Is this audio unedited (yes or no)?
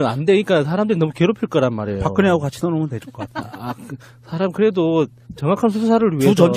yes